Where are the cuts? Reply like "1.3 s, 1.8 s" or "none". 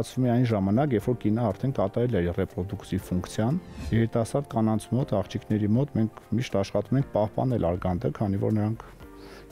3.7 s